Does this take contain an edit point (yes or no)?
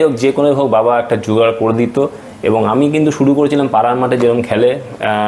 no